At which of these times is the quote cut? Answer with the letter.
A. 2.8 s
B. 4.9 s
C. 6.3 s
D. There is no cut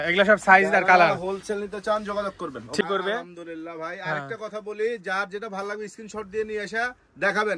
A